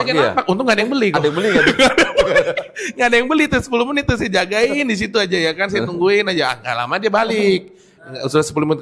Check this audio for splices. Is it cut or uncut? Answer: uncut